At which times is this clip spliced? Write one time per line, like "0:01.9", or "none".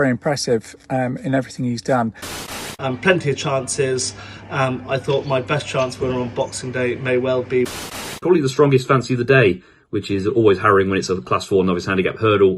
0:02.4
0:08.2